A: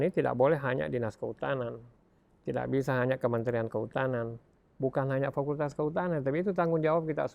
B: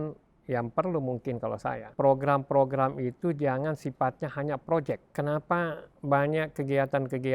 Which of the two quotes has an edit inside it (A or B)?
B